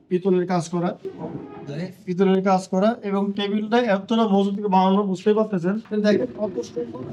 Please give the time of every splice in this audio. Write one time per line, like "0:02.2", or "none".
0:05.8